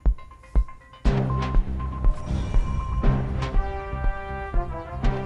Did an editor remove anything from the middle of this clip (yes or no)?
yes